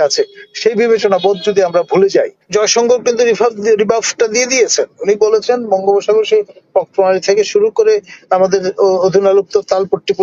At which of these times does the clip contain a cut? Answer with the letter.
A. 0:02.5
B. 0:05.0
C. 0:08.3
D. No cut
A